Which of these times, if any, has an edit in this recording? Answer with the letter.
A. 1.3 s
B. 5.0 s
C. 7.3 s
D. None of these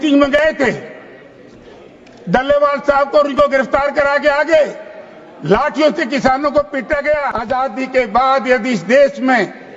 C